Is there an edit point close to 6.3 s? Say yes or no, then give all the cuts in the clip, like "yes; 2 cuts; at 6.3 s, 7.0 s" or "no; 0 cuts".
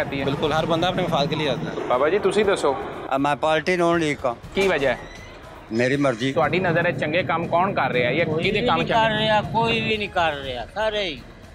yes; 3 cuts; at 1.7 s, 4.5 s, 6.3 s